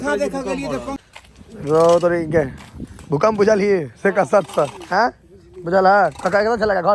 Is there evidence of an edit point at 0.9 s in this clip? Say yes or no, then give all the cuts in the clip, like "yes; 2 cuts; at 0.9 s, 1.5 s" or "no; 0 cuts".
yes; 1 cut; at 0.9 s